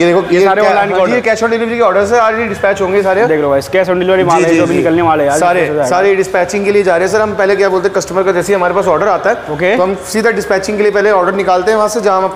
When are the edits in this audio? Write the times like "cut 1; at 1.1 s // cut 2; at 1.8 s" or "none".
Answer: none

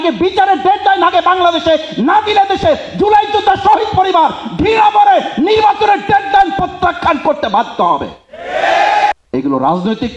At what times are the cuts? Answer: cut 1; at 9.1 s

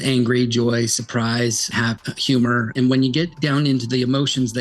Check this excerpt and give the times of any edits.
cut 1; at 1.7 s // cut 2; at 2.7 s

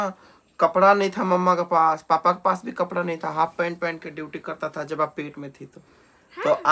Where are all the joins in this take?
none

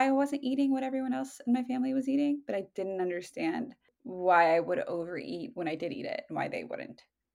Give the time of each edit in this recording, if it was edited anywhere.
none

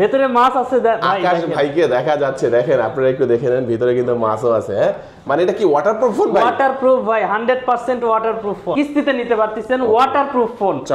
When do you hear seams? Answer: cut 1; at 8.7 s

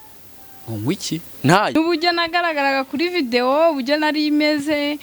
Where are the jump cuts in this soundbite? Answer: cut 1; at 1.8 s

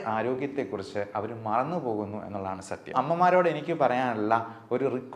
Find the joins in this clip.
cut 1; at 2.9 s

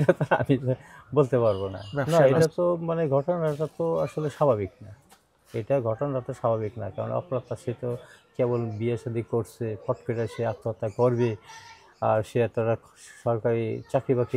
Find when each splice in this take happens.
cut 1; at 2.1 s

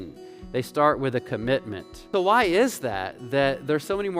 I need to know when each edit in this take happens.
cut 1; at 2.0 s

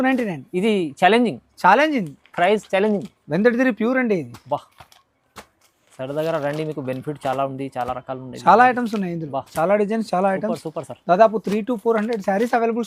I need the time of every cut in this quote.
none

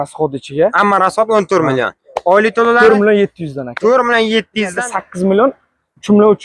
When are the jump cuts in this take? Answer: cut 1; at 4.8 s

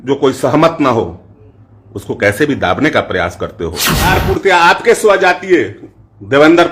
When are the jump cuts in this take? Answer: cut 1; at 4.2 s

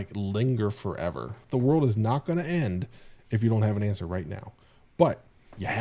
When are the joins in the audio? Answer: cut 1; at 1.4 s

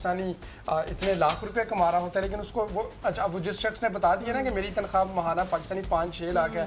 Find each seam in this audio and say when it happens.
none

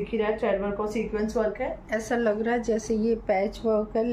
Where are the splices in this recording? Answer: none

